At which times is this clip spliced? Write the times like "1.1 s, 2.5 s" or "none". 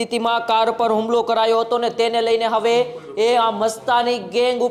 none

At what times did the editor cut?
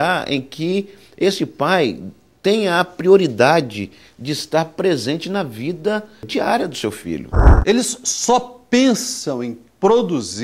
7.4 s

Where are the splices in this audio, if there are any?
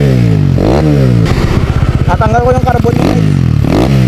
1.3 s

